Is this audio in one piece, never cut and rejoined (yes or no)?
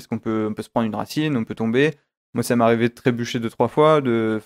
yes